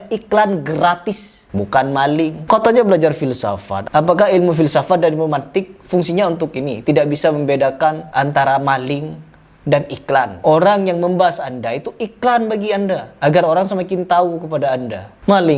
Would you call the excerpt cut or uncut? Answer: cut